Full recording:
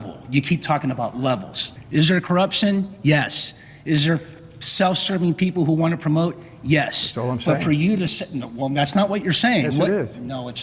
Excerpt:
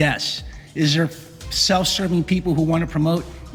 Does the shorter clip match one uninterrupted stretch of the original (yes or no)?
yes